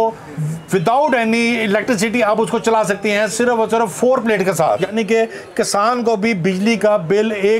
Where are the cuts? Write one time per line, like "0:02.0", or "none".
0:04.9